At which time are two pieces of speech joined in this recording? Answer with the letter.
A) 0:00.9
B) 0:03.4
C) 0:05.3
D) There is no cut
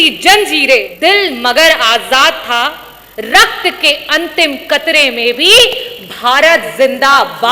A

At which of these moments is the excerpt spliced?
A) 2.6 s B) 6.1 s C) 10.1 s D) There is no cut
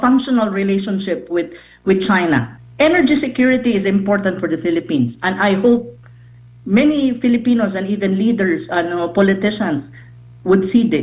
A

